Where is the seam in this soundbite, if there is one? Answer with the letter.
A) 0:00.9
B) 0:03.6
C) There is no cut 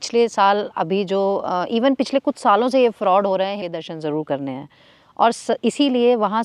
B